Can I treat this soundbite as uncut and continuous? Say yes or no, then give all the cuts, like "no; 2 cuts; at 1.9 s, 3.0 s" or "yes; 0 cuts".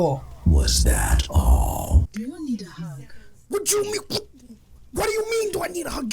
no; 1 cut; at 2.1 s